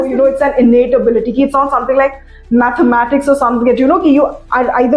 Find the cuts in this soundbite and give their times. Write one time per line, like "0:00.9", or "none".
none